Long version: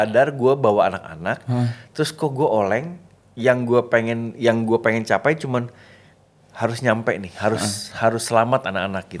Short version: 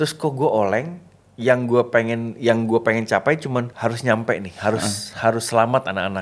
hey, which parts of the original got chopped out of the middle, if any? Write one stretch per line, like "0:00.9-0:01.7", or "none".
0:05.7-0:06.5